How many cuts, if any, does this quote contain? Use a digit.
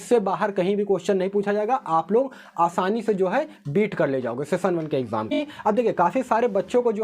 1